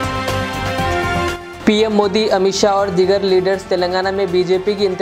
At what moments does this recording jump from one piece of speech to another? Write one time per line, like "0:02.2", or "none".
none